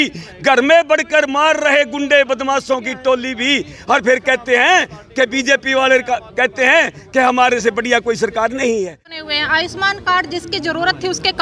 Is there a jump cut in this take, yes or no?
yes